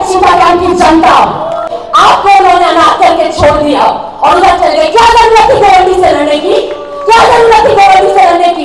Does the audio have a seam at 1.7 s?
yes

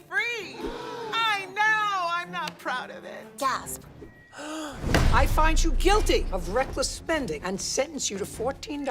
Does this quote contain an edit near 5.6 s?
yes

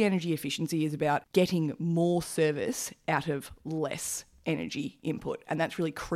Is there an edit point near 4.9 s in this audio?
no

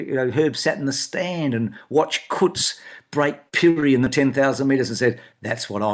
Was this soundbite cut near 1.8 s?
no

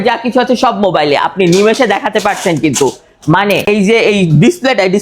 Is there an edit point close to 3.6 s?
yes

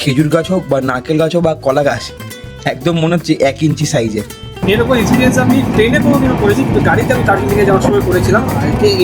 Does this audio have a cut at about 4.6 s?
yes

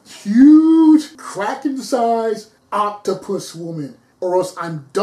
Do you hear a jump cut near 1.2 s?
yes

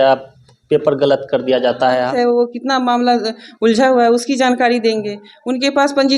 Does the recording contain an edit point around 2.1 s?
yes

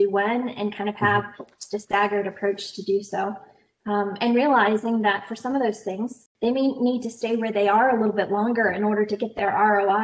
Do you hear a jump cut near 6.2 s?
yes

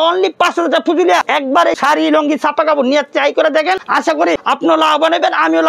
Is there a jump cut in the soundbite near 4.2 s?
yes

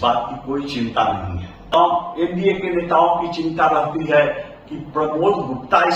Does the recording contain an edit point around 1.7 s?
yes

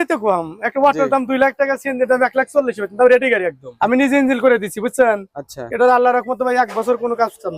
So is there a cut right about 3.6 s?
yes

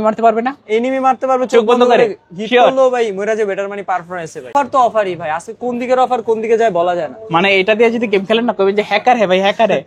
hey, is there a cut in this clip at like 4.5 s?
yes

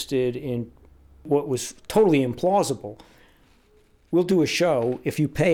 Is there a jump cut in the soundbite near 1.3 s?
yes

